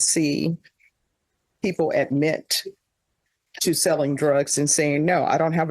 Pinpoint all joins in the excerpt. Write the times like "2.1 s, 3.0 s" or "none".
none